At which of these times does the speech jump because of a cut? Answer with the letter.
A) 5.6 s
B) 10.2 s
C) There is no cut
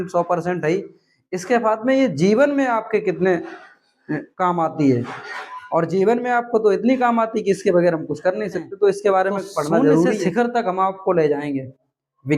B